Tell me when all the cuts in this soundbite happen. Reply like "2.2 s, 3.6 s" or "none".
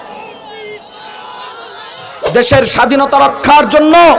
2.1 s

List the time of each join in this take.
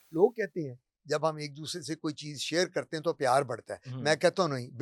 none

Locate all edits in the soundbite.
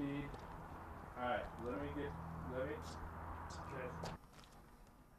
none

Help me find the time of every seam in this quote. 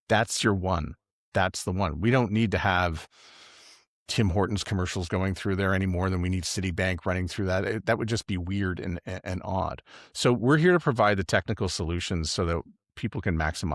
none

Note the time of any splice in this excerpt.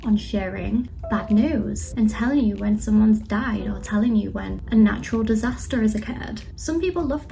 1.0 s, 1.8 s

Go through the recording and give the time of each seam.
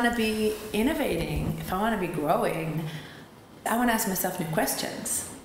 3.6 s

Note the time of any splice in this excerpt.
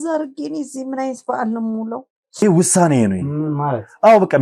2.4 s

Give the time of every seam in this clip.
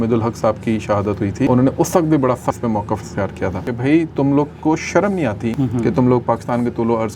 1.5 s, 2.6 s, 3.6 s, 5.5 s

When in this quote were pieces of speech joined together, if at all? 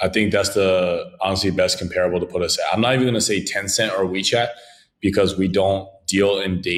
none

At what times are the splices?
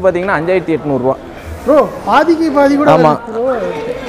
none

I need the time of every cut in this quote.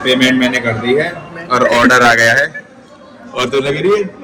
none

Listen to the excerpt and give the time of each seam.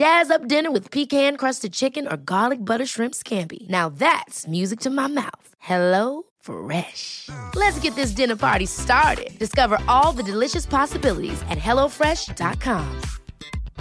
none

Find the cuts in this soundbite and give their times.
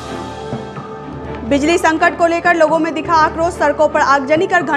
1.2 s

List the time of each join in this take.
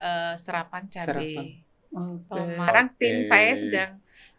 2.7 s

